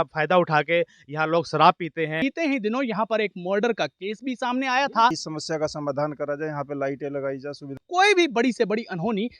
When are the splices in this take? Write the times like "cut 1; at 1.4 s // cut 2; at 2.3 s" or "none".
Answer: cut 1; at 2.2 s // cut 2; at 5.2 s // cut 3; at 7.8 s